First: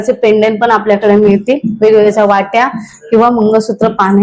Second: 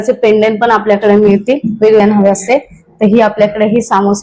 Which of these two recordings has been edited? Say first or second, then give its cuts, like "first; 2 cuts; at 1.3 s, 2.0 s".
second; 1 cut; at 2.0 s